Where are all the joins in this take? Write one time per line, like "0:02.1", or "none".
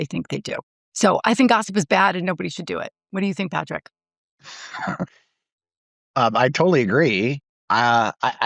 none